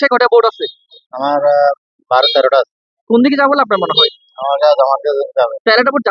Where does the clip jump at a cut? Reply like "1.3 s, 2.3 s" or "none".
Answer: none